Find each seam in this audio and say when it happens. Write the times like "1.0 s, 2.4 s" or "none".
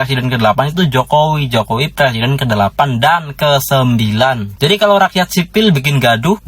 4.5 s